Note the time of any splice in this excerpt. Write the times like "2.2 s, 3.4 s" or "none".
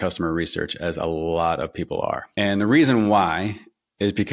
2.3 s